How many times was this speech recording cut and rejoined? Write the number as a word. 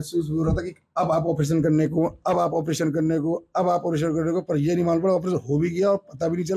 zero